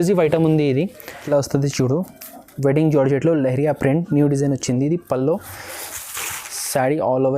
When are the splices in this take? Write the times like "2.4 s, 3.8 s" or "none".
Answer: 1.1 s